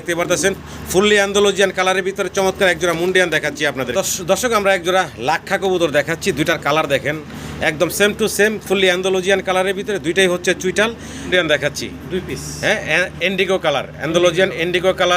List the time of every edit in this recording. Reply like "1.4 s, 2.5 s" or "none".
3.9 s, 11.1 s